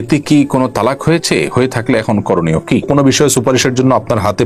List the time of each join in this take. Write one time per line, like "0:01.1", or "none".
0:02.8